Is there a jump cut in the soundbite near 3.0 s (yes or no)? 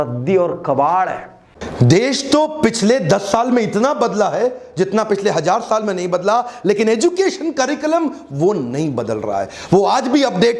no